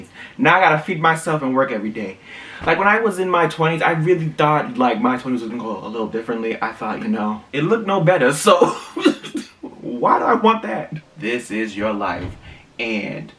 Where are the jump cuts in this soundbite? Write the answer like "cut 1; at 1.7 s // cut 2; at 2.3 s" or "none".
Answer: cut 1; at 7.4 s // cut 2; at 11.0 s